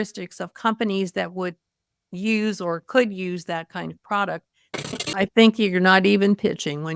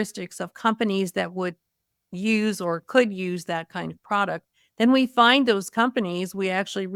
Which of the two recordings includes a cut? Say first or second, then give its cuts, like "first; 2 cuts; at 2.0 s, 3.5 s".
first; 1 cut; at 4.8 s